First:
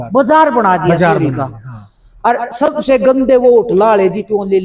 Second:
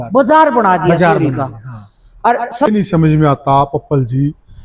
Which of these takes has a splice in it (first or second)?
second